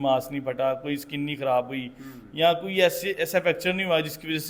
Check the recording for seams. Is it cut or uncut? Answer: uncut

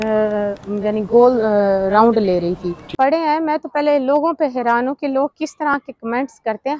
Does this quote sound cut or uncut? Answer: cut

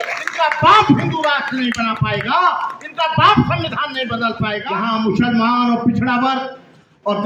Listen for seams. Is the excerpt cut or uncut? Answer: cut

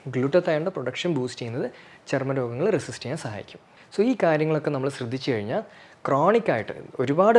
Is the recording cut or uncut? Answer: uncut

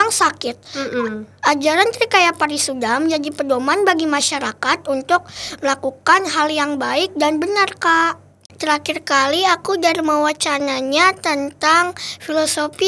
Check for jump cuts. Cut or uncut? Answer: cut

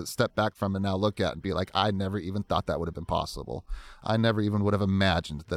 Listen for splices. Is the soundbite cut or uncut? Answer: uncut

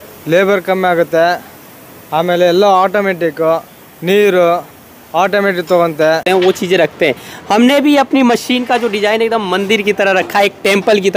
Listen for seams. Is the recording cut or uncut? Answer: cut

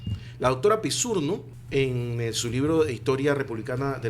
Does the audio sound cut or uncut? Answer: cut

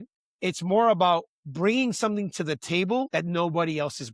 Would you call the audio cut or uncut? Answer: cut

